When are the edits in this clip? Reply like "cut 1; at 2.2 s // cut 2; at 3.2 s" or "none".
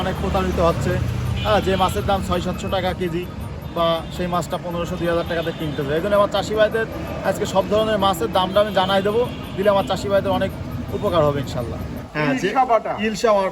cut 1; at 12.1 s